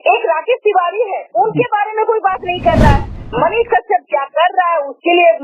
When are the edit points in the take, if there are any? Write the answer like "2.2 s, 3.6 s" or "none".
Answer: 3.2 s